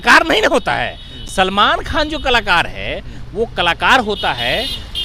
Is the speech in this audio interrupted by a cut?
no; 0 cuts

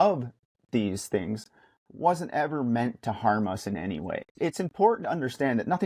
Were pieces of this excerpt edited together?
yes; 1 cut; at 4.3 s

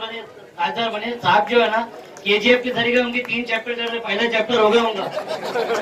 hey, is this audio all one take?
yes; 0 cuts

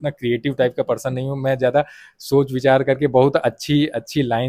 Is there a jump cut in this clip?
no; 0 cuts

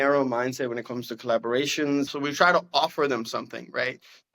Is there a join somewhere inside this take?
yes; 1 cut; at 2.1 s

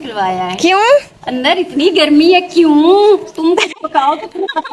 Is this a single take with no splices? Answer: yes; 0 cuts

